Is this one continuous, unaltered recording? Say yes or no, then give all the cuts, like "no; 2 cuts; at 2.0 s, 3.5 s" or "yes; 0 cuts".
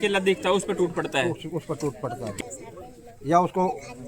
no; 1 cut; at 2.4 s